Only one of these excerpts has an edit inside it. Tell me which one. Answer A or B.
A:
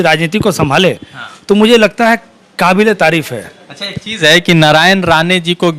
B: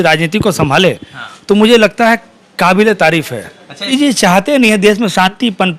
B